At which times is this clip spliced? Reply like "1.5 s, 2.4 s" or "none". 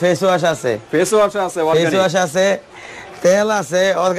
none